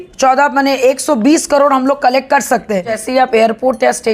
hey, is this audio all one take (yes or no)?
no